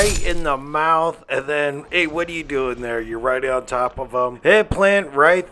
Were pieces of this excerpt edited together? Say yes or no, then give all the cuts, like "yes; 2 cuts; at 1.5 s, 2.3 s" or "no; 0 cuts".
no; 0 cuts